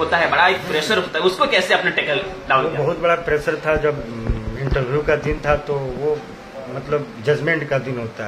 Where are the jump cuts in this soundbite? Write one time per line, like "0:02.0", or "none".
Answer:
none